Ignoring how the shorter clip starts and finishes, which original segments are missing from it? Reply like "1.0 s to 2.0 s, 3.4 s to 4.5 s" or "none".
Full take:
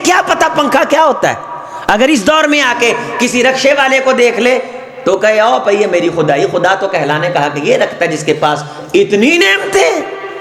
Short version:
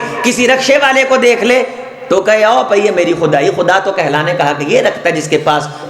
none